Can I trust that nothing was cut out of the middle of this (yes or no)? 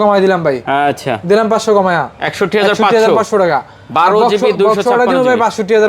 yes